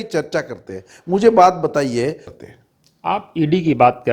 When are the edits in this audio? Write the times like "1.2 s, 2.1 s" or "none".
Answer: 2.3 s